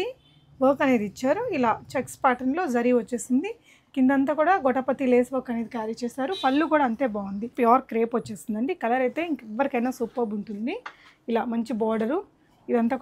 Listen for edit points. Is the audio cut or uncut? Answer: cut